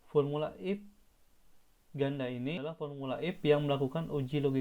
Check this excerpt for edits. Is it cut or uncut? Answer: cut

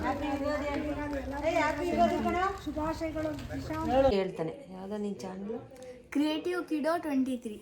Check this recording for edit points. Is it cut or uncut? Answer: cut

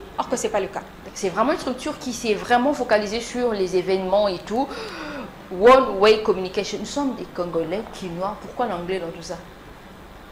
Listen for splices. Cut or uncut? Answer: cut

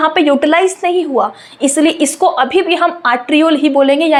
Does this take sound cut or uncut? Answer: uncut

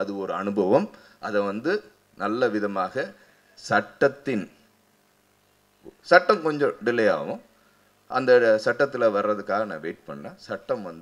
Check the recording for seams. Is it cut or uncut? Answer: uncut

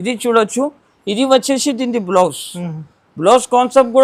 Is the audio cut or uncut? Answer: uncut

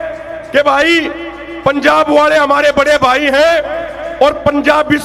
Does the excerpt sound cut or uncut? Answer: uncut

